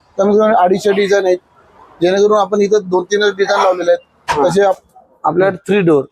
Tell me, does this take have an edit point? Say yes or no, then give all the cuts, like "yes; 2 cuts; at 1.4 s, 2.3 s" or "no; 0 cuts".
yes; 1 cut; at 4.8 s